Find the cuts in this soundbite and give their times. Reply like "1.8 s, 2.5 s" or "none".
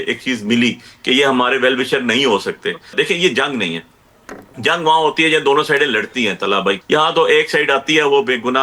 2.9 s, 6.8 s